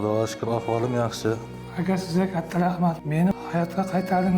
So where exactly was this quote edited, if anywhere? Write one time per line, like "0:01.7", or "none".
0:01.6
0:03.1